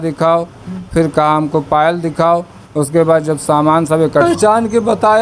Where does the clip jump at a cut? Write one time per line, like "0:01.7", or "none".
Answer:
0:04.2